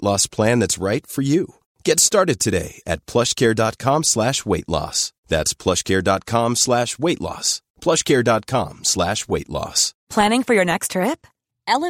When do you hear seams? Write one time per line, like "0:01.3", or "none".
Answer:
0:09.9